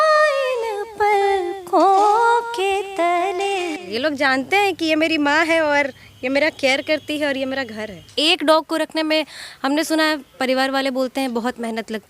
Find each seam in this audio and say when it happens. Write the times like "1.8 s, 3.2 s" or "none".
3.9 s, 8.0 s